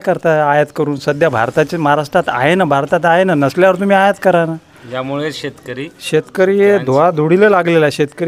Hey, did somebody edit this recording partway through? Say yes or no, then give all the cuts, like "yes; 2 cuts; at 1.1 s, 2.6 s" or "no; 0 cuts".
no; 0 cuts